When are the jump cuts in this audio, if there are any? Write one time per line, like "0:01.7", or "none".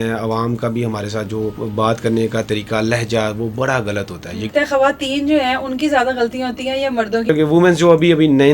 0:01.6
0:04.5
0:07.3